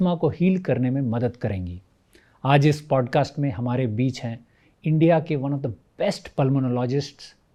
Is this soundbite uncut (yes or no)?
yes